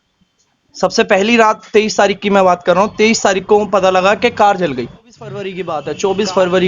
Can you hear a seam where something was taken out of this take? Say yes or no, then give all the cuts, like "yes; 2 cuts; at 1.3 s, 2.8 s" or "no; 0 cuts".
yes; 1 cut; at 5.5 s